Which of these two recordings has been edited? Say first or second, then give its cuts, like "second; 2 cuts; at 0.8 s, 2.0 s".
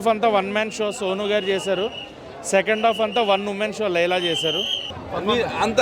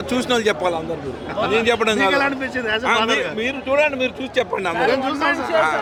first; 1 cut; at 4.8 s